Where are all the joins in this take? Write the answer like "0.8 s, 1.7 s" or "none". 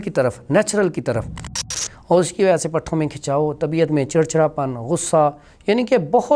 1.5 s